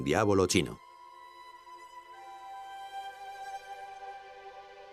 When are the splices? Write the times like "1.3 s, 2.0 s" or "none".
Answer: none